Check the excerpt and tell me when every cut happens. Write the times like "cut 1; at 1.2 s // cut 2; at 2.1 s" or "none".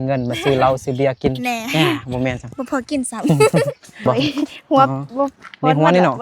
cut 1; at 4.1 s